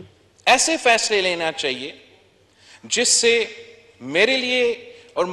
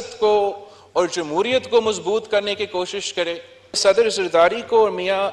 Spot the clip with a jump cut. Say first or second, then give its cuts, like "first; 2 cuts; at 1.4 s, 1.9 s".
second; 1 cut; at 3.8 s